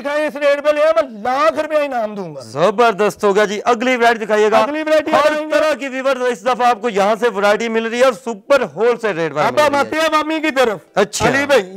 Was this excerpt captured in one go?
yes; 0 cuts

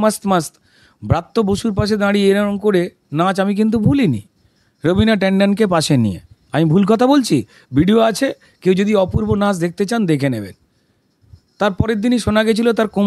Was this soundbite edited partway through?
no; 0 cuts

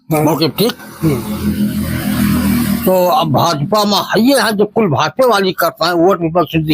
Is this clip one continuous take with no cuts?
yes; 0 cuts

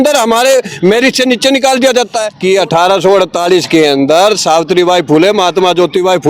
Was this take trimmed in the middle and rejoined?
yes; 1 cut; at 2.3 s

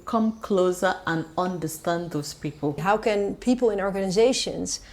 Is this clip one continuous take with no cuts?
no; 1 cut; at 2.8 s

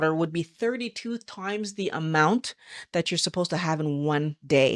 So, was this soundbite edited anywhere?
no; 0 cuts

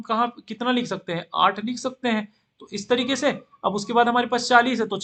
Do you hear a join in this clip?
no; 0 cuts

